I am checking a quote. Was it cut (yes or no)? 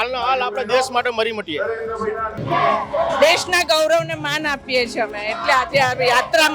yes